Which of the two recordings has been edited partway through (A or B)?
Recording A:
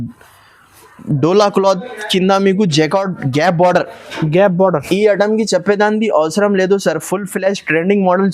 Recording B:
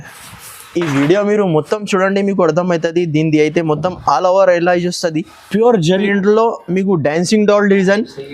B